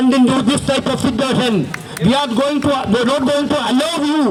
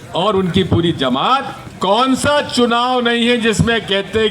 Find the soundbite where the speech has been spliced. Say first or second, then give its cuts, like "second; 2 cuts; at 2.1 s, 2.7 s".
second; 1 cut; at 1.6 s